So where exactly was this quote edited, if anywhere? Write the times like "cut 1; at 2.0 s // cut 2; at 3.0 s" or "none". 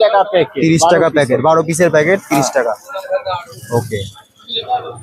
none